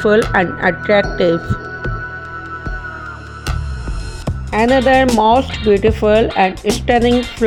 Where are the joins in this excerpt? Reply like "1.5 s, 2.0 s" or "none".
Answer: none